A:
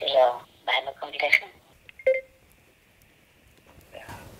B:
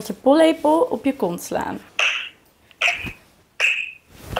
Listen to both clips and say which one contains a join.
B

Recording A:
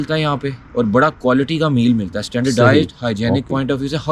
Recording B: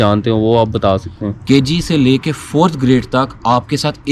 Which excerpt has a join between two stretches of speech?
B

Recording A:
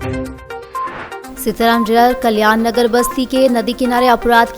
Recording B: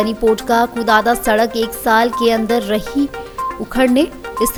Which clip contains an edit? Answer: A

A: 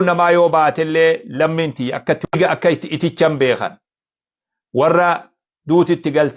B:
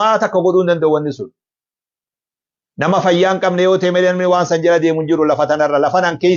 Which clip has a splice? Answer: A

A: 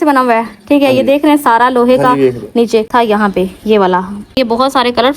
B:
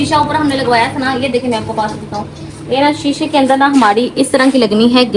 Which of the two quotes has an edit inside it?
A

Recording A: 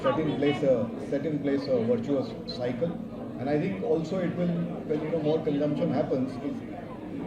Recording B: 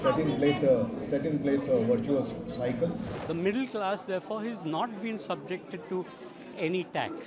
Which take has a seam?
B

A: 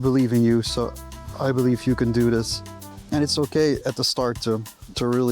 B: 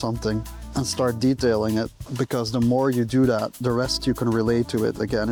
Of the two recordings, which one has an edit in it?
A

